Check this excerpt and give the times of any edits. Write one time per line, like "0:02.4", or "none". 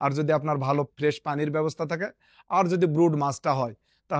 none